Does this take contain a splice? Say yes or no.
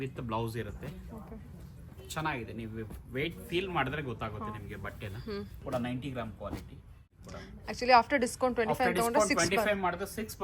yes